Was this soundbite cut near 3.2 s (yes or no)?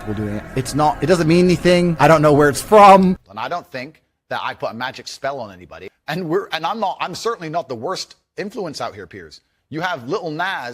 yes